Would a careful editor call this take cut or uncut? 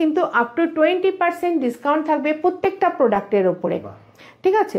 uncut